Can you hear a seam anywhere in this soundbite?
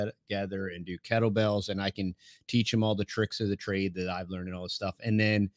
no; 0 cuts

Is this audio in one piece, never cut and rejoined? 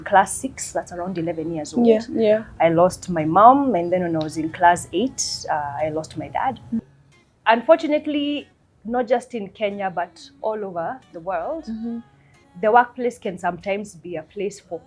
no; 1 cut; at 6.8 s

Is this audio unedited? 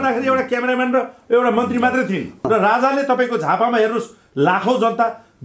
no; 1 cut; at 2.4 s

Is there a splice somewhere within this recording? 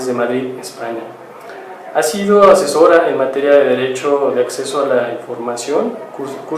no; 0 cuts

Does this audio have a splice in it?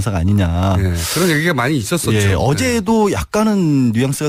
no; 0 cuts

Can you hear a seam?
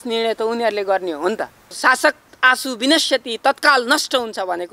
yes; 1 cut; at 1.8 s

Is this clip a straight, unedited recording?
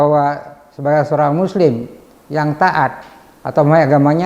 yes; 0 cuts

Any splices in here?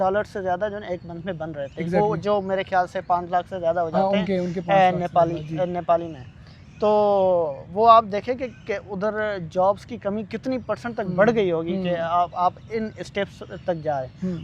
no; 0 cuts

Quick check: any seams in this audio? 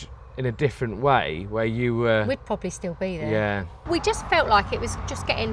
yes; 1 cut; at 3.7 s

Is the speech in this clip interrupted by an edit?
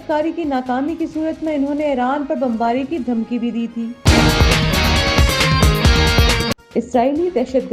yes; 2 cuts; at 4.0 s, 6.6 s

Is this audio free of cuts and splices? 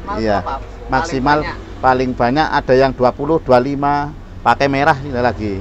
yes; 0 cuts

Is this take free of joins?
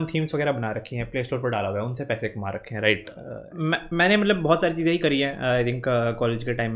no; 1 cut; at 3.4 s

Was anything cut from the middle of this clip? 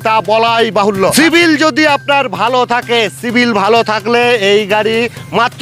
yes; 1 cut; at 1.1 s

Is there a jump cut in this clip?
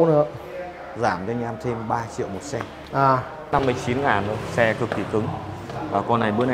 yes; 1 cut; at 3.5 s

